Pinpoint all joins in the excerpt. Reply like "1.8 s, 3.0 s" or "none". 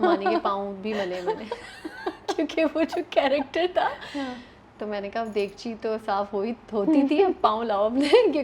none